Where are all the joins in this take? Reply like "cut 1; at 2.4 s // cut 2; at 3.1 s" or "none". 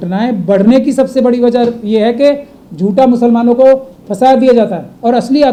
none